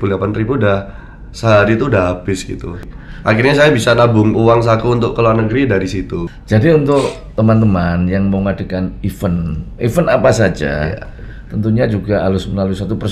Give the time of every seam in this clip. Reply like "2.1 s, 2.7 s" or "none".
2.8 s, 6.2 s